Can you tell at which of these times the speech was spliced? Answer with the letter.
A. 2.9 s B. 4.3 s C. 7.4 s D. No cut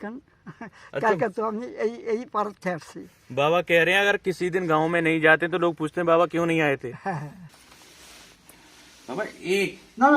C